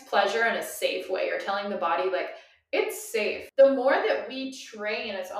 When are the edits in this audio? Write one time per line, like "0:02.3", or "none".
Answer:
0:03.4